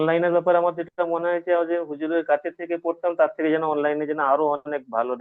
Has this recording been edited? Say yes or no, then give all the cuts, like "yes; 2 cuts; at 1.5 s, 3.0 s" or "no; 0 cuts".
no; 0 cuts